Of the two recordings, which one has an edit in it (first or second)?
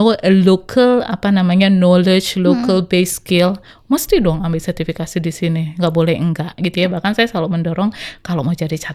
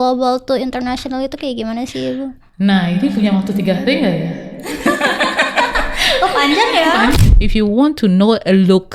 second